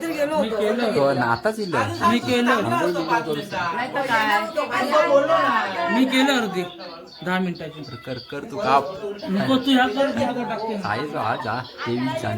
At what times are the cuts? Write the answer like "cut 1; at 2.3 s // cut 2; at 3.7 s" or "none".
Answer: none